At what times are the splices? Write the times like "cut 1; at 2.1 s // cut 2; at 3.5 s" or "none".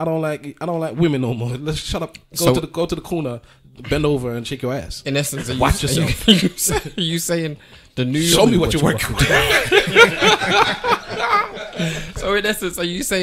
none